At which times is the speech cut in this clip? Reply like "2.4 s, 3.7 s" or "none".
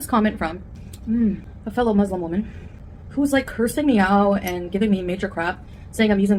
none